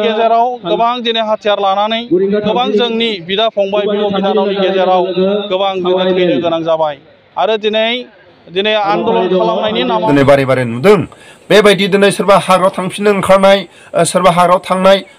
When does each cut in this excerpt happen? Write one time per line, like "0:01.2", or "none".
0:10.1